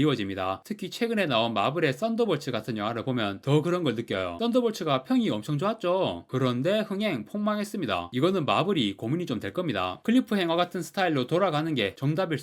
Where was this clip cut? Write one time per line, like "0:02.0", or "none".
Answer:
0:10.0